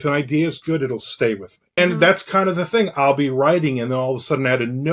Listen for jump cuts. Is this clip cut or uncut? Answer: cut